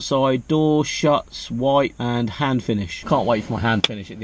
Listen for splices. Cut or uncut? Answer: cut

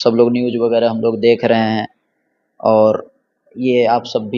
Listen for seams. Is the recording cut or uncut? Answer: uncut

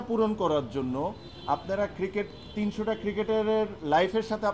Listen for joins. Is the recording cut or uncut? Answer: uncut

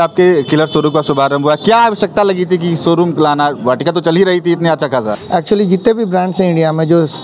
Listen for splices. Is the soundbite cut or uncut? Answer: cut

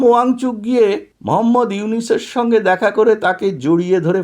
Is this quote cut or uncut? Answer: cut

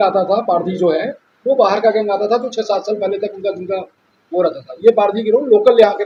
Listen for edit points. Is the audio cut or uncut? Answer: uncut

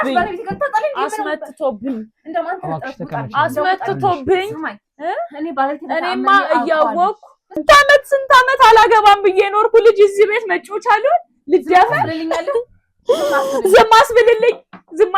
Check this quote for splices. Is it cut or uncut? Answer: cut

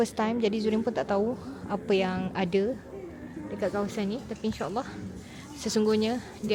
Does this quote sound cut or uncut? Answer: uncut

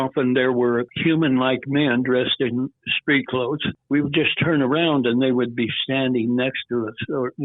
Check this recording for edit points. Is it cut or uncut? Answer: cut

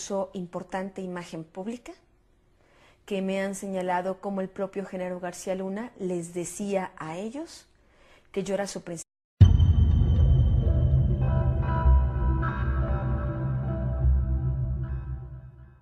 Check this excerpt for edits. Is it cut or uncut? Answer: uncut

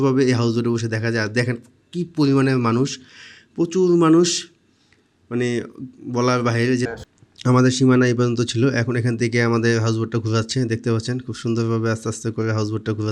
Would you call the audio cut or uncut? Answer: uncut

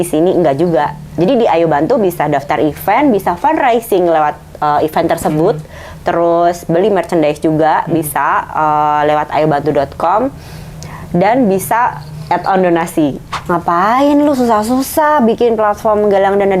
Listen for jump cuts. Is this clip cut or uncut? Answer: cut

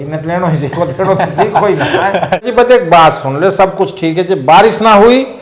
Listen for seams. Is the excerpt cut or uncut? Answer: cut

